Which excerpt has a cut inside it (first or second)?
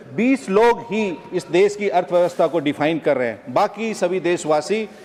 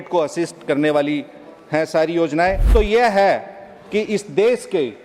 second